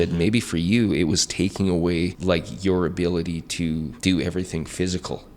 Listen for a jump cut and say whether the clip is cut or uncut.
cut